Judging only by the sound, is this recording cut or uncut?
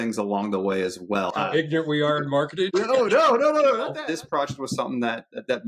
cut